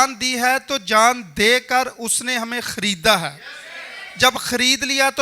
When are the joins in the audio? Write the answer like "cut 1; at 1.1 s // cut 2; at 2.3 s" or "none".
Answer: none